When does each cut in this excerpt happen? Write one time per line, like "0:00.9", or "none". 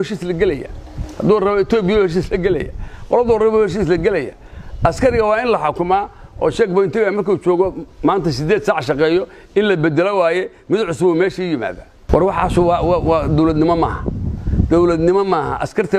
0:11.9